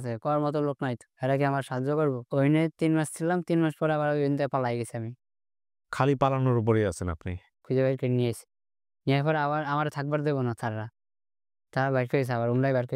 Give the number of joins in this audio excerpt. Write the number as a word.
two